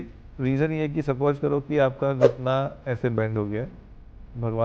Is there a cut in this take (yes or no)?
no